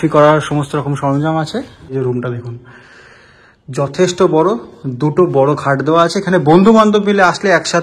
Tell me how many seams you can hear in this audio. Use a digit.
1